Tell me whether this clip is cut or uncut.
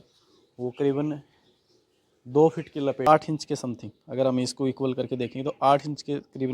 cut